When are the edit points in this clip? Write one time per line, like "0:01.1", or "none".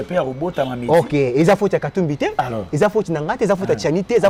none